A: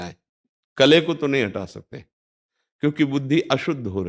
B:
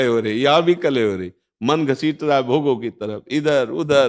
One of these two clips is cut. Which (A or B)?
B